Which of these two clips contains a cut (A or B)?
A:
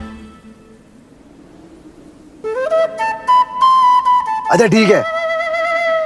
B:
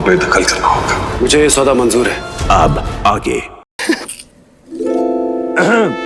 B